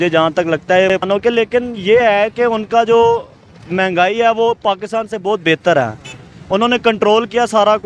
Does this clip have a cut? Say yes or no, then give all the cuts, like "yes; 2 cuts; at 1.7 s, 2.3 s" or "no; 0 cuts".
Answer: yes; 1 cut; at 1.0 s